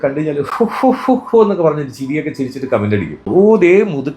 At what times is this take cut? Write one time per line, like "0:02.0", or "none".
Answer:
0:03.2